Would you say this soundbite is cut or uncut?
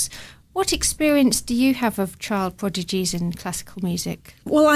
cut